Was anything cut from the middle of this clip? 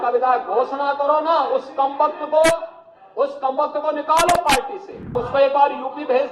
yes; 1 cut; at 5.2 s

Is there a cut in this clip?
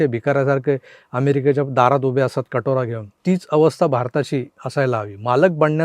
yes; 2 cuts; at 3.1 s, 4.6 s

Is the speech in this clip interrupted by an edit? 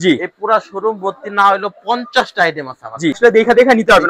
yes; 1 cut; at 3.2 s

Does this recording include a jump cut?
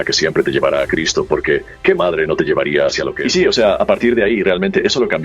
yes; 1 cut; at 3.2 s

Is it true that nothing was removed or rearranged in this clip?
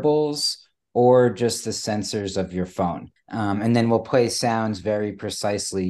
no; 1 cut; at 3.1 s

